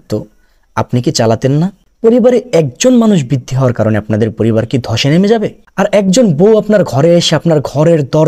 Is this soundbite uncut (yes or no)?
yes